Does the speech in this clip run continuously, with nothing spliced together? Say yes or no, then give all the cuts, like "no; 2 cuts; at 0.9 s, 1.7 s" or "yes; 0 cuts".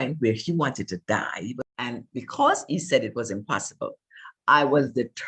no; 1 cut; at 1.5 s